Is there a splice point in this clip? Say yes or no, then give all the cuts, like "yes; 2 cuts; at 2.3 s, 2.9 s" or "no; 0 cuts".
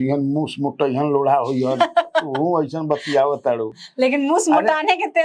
no; 0 cuts